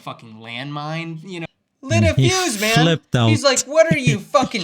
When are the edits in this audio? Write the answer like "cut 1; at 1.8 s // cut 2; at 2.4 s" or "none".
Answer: cut 1; at 1.5 s